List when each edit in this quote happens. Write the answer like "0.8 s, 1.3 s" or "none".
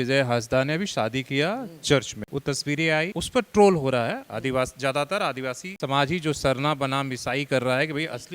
2.2 s, 3.2 s, 5.7 s